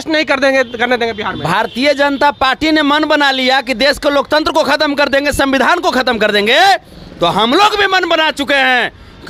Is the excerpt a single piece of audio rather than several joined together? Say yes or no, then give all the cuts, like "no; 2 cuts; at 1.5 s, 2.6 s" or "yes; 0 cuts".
yes; 0 cuts